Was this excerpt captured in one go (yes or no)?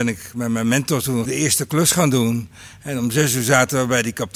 no